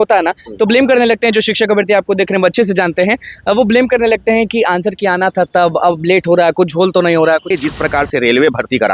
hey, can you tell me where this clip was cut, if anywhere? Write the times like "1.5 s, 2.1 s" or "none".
7.5 s